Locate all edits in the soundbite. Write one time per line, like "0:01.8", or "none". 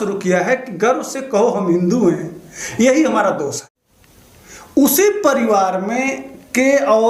0:03.7